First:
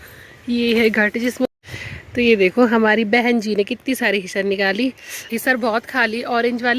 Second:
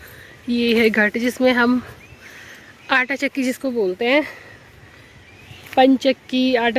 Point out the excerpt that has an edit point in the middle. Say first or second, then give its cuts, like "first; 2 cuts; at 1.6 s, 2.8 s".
first; 2 cuts; at 1.5 s, 5.1 s